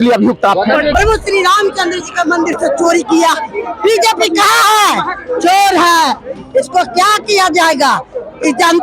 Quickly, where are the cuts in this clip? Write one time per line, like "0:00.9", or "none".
0:00.9

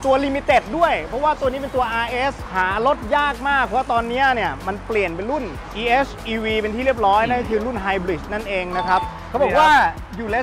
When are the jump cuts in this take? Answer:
0:09.1

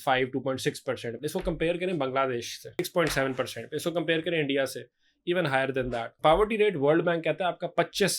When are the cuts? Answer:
0:01.1
0:02.8
0:06.1

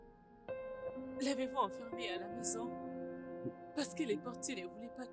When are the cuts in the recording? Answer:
0:01.0

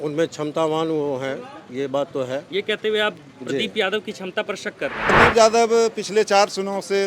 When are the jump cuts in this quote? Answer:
0:05.1

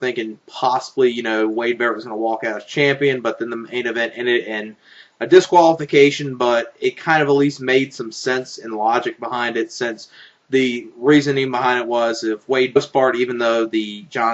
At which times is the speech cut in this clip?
none

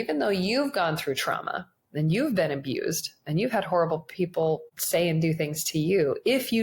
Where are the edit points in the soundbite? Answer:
0:04.7

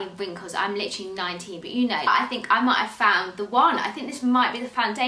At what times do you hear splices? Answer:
0:02.1

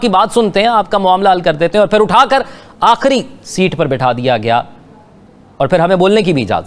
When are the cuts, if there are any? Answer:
none

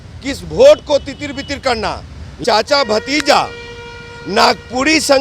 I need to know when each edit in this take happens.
0:02.4

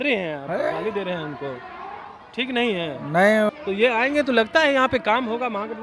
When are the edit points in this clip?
0:03.5

